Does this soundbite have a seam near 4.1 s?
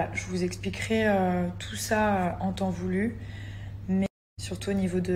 yes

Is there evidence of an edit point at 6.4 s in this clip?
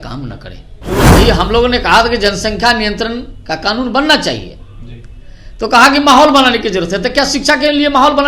no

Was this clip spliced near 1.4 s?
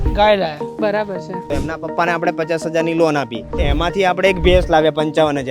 yes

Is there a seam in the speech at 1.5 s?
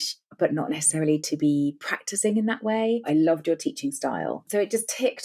no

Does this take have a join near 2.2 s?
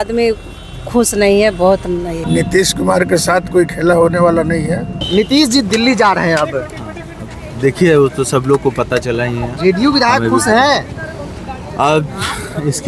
yes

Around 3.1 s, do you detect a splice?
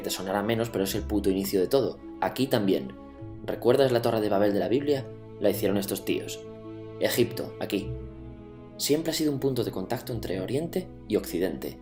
no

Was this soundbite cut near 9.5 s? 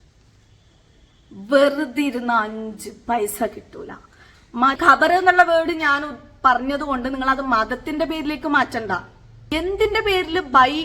yes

